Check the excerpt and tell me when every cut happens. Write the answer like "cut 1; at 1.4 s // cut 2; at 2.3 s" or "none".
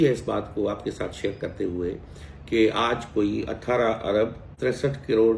cut 1; at 4.5 s